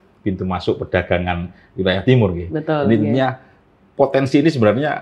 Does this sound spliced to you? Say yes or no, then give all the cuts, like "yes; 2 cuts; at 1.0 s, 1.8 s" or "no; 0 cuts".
no; 0 cuts